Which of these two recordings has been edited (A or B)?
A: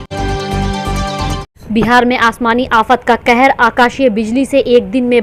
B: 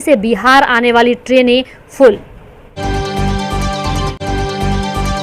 B